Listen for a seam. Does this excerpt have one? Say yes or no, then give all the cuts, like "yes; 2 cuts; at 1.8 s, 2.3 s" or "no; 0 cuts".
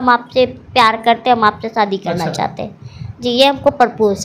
no; 0 cuts